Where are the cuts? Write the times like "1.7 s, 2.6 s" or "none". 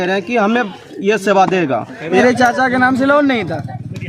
2.2 s

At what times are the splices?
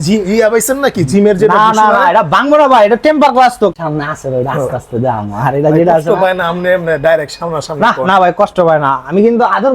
3.8 s

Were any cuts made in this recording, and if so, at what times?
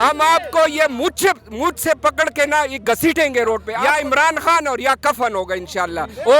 3.7 s

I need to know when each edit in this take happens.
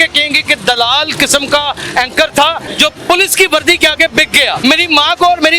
2.7 s, 4.6 s

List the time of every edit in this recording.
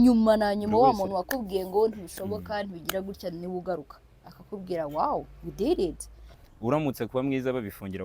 6.4 s

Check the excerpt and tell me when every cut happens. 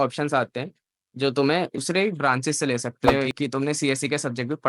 1.8 s, 3.1 s

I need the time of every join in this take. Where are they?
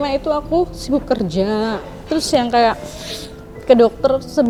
none

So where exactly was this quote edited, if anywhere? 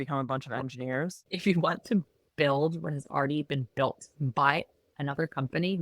1.2 s

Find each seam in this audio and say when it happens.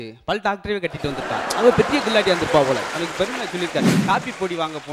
4.0 s

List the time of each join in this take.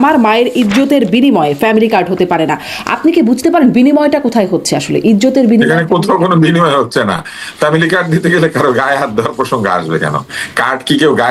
none

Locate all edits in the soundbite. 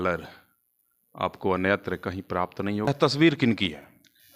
2.9 s

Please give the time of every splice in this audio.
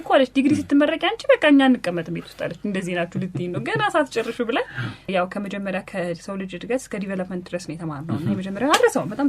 5.1 s

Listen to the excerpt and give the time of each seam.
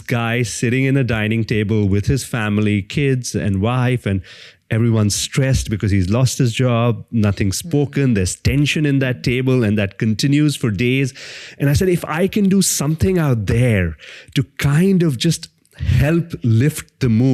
none

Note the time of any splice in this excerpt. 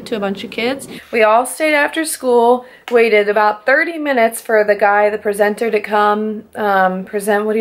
0.9 s

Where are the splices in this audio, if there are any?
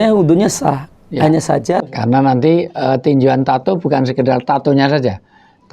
1.8 s

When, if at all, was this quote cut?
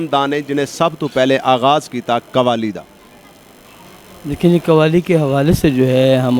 none

